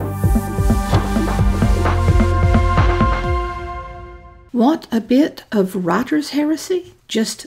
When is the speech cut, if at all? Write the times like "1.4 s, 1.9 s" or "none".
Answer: 6.5 s